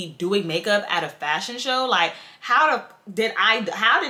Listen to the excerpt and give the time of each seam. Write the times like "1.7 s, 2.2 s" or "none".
none